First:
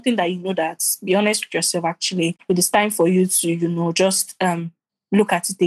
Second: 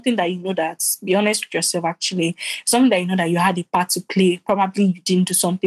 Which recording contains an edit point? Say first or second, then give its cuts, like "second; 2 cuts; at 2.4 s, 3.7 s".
first; 1 cut; at 2.4 s